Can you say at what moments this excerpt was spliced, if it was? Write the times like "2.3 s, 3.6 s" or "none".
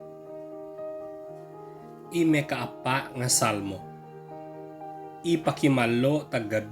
2.1 s, 3.8 s, 5.2 s